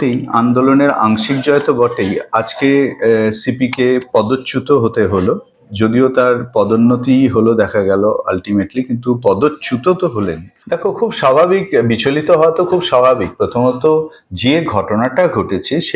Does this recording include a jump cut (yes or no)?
yes